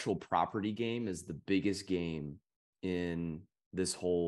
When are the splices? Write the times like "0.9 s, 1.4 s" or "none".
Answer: none